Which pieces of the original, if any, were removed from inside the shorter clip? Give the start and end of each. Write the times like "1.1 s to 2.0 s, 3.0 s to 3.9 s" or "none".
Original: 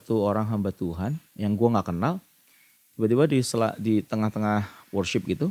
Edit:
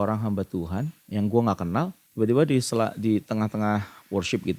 2.3 s to 2.8 s

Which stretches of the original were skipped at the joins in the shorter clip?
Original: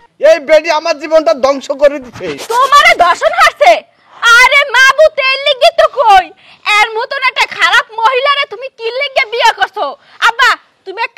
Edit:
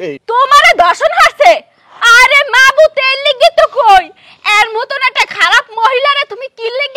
none

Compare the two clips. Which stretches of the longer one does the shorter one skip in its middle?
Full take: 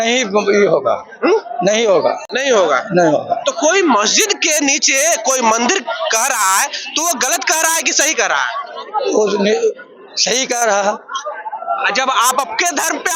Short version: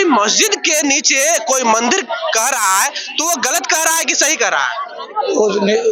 none

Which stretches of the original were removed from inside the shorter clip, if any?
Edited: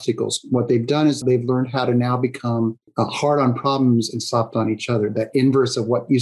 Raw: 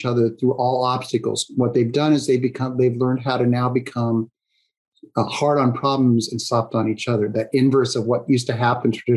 2.2 s to 2.7 s, 4.4 s to 5.0 s

